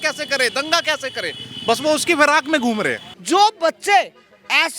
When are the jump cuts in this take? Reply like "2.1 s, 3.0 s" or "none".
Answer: 3.1 s

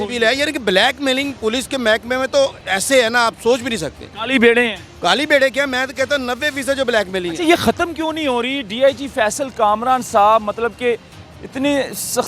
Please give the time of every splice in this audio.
none

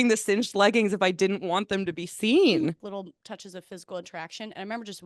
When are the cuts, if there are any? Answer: 2.9 s

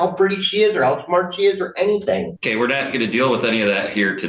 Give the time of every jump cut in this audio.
none

